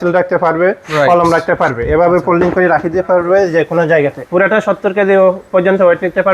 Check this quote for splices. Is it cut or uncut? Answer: cut